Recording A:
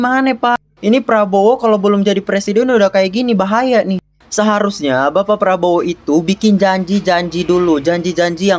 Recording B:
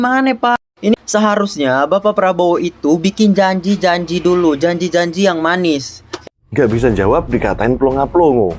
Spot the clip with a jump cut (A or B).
B